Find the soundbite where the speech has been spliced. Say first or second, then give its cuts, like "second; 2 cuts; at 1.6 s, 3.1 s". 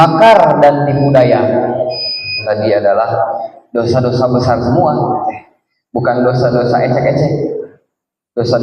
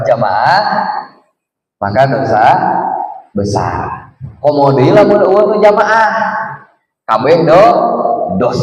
first; 1 cut; at 2.4 s